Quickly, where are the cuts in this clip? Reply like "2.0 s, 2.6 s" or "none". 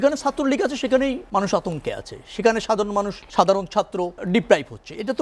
1.2 s, 3.2 s, 4.2 s